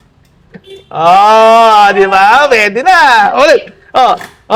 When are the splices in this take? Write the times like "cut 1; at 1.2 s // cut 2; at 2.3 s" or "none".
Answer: none

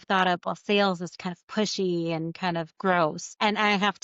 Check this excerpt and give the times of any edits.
cut 1; at 2.9 s

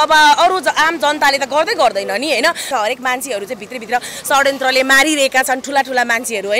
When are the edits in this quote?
cut 1; at 2.6 s

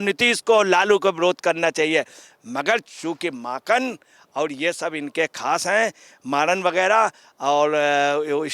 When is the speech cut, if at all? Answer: none

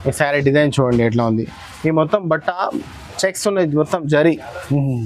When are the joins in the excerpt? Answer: none

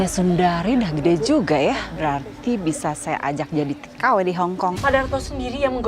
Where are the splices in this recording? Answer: cut 1; at 1.9 s // cut 2; at 4.8 s

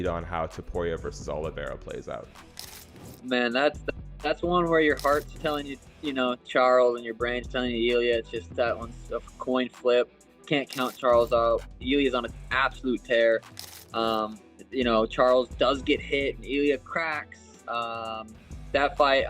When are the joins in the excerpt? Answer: none

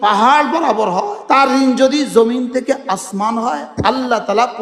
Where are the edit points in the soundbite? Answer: cut 1; at 1.4 s

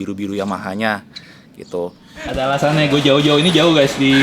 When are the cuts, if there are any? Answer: cut 1; at 2.4 s

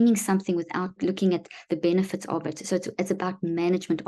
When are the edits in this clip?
cut 1; at 1.0 s

